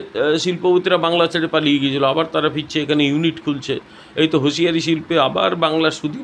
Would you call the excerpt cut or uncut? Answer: uncut